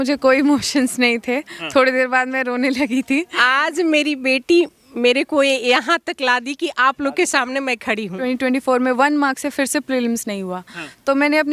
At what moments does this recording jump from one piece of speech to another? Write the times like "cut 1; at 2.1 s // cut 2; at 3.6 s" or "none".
cut 1; at 3.4 s // cut 2; at 8.2 s